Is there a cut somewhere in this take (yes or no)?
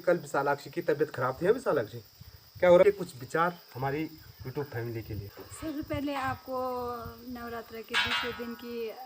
yes